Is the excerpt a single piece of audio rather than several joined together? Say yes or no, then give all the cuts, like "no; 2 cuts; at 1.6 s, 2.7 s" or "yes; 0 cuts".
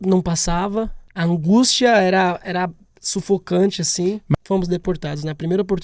no; 2 cuts; at 1.0 s, 4.3 s